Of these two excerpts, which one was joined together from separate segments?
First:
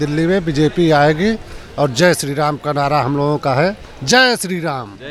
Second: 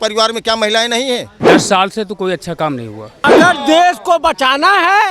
second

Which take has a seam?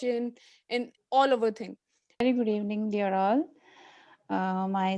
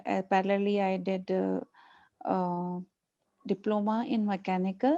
first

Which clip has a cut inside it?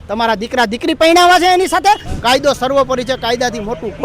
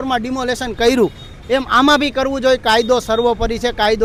first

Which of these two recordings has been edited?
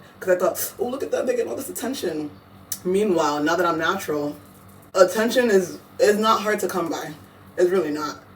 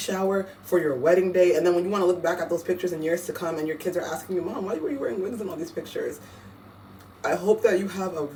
first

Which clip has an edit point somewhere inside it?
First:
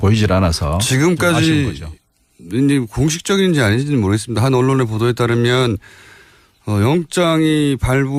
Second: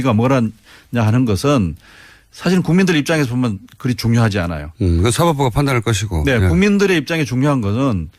second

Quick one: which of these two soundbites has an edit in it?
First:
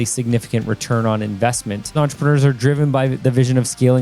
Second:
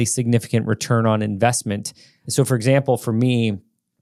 first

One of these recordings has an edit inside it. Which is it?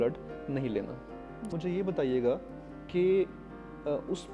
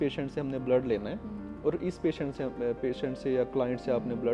first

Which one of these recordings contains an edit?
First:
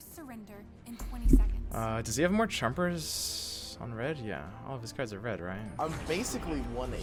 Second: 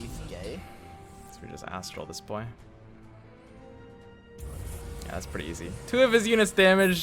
second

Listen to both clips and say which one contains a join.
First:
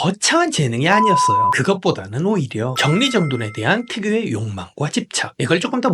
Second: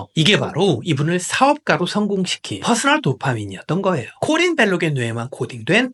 first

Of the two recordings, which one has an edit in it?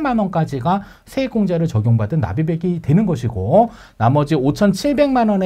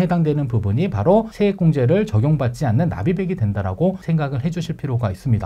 second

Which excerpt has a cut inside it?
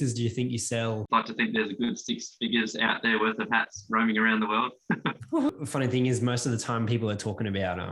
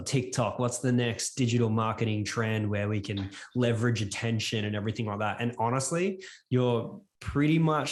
first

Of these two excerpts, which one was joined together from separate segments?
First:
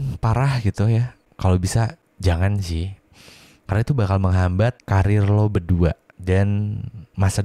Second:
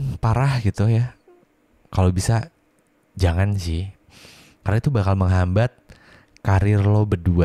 first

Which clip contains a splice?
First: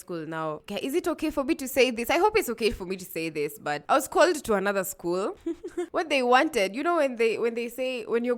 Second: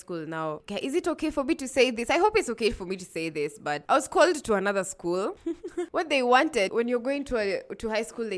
second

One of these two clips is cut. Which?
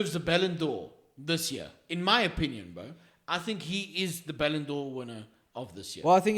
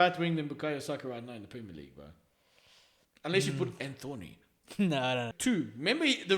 second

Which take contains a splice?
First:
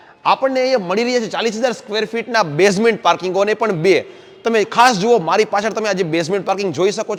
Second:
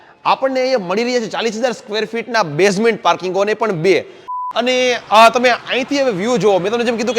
second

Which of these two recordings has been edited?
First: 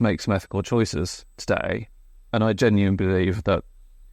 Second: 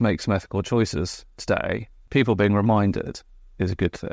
second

